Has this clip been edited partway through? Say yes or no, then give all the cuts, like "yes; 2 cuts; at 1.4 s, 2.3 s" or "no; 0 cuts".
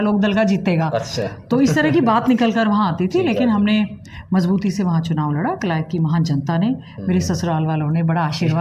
no; 0 cuts